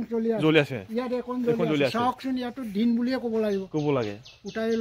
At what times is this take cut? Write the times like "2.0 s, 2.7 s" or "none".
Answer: none